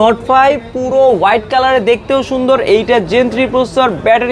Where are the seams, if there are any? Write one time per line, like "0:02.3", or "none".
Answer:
none